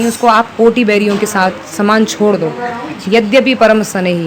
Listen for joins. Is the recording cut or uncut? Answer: uncut